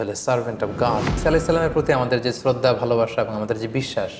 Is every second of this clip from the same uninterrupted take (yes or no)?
no